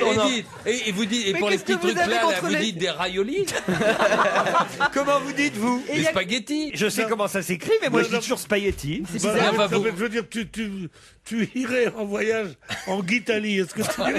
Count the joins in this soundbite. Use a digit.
1